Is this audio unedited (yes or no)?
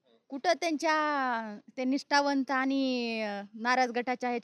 yes